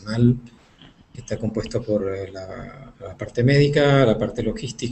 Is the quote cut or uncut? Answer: cut